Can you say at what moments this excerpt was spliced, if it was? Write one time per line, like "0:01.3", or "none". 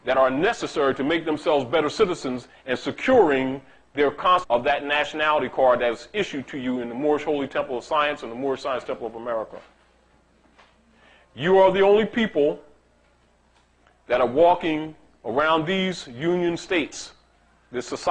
none